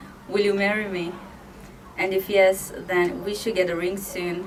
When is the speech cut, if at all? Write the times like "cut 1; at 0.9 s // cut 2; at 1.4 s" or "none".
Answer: none